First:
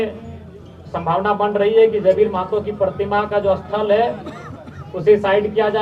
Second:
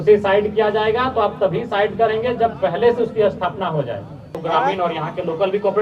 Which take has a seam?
second; 1 cut; at 4.4 s

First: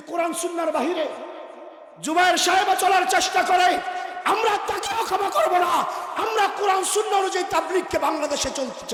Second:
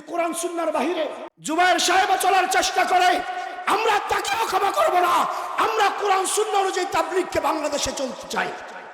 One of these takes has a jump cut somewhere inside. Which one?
second; 1 cut; at 1.3 s

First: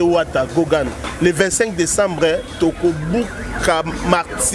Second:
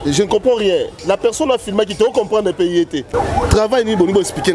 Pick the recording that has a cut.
second; 1 cut; at 3.1 s

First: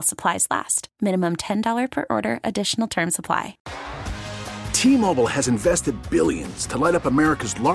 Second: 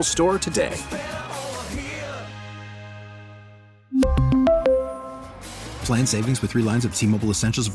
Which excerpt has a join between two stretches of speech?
first; 1 cut; at 3.6 s

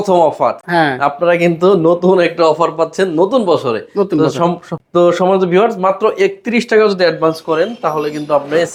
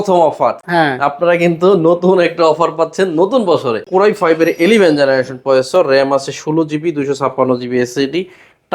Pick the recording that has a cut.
second; 1 cut; at 3.9 s

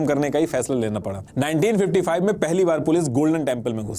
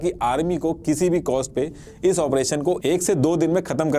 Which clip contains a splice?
first; 1 cut; at 1.2 s

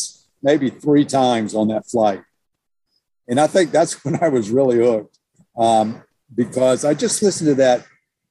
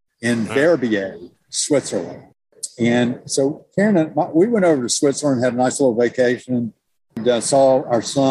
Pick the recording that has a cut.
second; 2 cuts; at 2.4 s, 7.2 s

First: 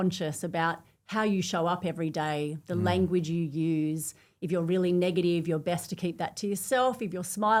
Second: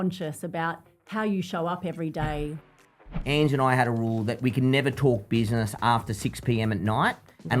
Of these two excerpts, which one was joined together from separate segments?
second; 1 cut; at 2.8 s

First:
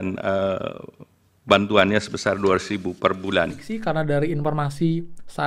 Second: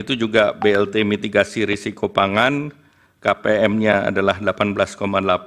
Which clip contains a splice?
first; 1 cut; at 3.7 s

